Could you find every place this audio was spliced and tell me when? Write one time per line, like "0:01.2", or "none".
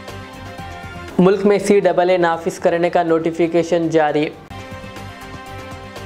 none